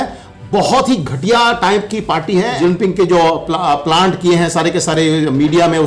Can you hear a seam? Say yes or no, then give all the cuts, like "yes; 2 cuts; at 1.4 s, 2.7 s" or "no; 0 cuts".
yes; 1 cut; at 2.6 s